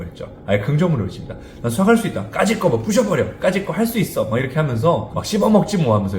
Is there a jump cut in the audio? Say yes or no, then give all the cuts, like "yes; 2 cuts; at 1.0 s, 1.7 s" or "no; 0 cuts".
yes; 1 cut; at 5.1 s